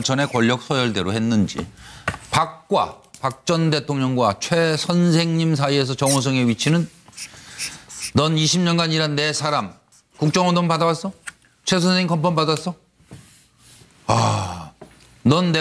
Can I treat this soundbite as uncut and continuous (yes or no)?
yes